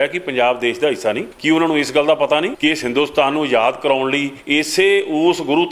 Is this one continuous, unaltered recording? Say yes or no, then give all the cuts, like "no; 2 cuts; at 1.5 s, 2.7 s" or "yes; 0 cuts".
no; 3 cuts; at 1.3 s, 2.5 s, 4.4 s